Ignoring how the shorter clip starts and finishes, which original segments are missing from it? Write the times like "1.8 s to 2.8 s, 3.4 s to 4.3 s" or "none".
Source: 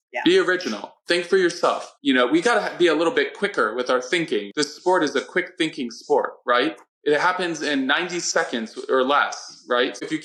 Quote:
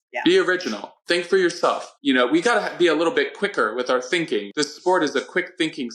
none